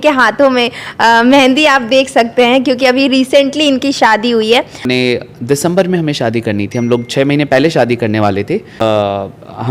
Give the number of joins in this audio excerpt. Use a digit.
2